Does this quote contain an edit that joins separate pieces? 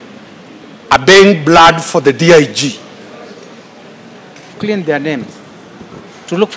yes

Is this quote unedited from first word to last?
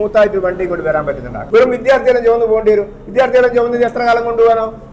no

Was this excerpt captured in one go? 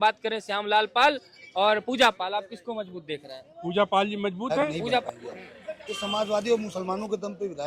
no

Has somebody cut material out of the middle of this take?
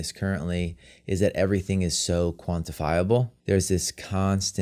yes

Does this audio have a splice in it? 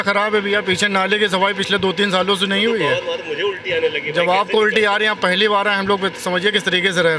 no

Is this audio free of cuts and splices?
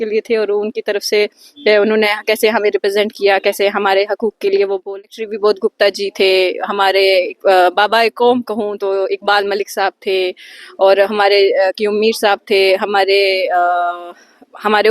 no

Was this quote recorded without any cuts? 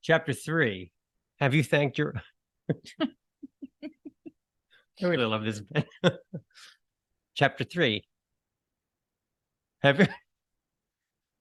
yes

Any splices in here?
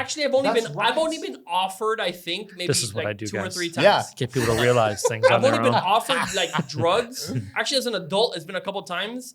no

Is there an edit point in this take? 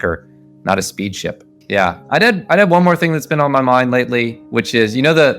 yes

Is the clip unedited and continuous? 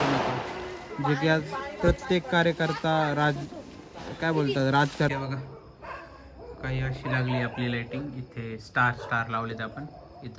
no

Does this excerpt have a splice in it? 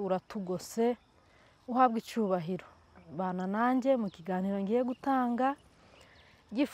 no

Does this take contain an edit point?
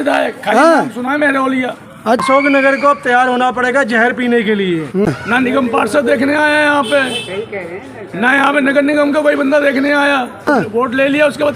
yes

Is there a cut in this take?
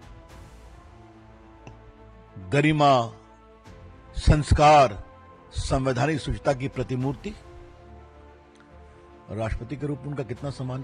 no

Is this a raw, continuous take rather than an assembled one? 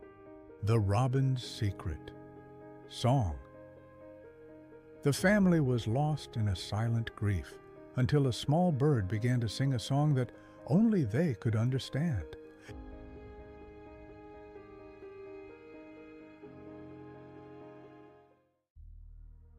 yes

